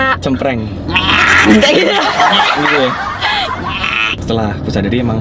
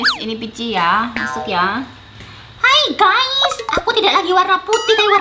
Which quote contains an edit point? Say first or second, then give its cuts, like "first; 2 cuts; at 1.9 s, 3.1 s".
first; 1 cut; at 4.2 s